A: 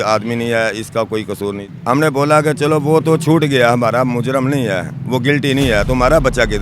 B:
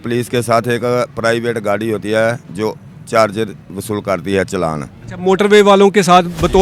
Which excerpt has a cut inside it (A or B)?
A